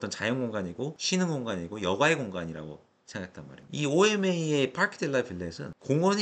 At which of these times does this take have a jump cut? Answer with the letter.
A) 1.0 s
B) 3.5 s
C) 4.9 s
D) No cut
B